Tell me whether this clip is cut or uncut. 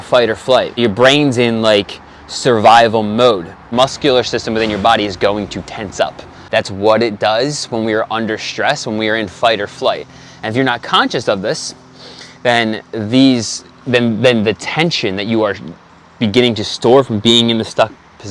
cut